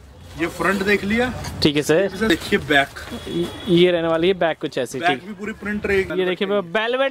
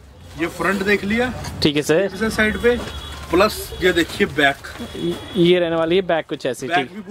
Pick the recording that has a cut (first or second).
first